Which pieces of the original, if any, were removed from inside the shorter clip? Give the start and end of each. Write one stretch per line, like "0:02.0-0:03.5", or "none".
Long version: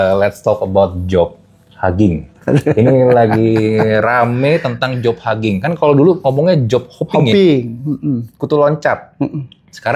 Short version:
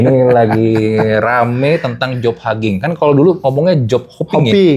none